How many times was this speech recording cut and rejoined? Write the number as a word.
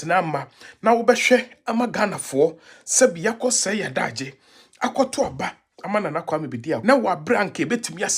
one